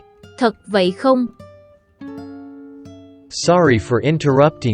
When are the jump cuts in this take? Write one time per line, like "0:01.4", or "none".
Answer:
0:01.8
0:03.2